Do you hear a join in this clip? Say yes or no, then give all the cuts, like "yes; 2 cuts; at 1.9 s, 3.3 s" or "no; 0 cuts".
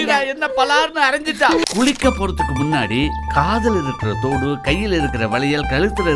yes; 1 cut; at 1.6 s